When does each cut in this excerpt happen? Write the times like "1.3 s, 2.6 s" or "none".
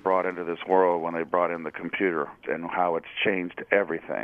2.4 s

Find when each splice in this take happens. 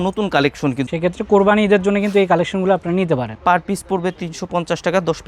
0.8 s, 3.3 s

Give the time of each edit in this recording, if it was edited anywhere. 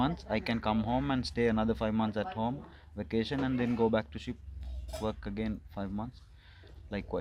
none

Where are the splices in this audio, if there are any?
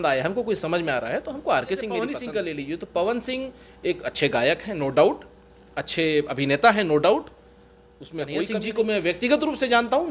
2.1 s, 8.4 s

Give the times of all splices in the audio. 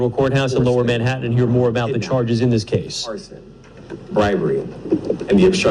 1.6 s

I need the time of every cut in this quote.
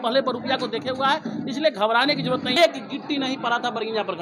2.6 s

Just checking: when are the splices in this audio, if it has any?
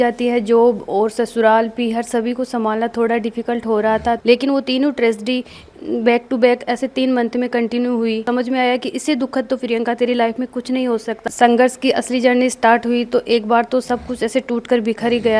4.2 s, 8.2 s, 11.1 s

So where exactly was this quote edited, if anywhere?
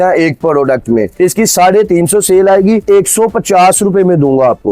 1.1 s, 2.8 s

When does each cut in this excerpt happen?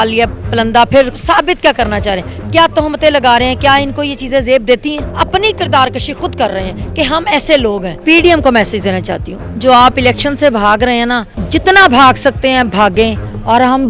1.2 s, 5.0 s, 7.9 s, 11.3 s

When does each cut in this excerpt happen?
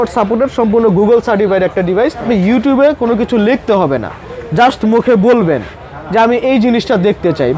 2.2 s

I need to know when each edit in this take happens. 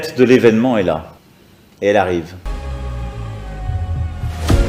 none

